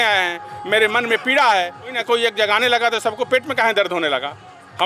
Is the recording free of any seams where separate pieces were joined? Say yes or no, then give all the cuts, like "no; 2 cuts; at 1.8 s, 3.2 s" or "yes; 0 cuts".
no; 1 cut; at 2.0 s